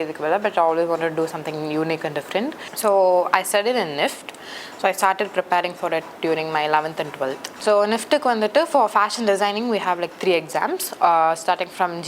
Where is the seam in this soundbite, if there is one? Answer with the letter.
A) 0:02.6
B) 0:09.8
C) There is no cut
A